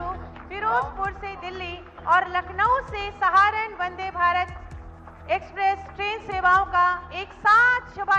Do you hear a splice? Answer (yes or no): no